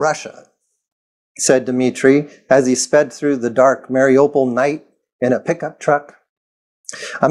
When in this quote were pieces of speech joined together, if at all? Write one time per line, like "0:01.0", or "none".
none